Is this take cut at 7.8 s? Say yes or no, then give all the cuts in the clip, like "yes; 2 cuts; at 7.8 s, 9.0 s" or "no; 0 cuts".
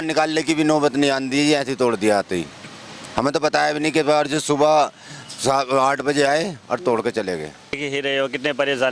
yes; 1 cut; at 7.8 s